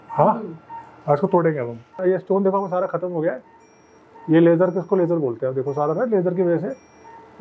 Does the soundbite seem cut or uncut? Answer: cut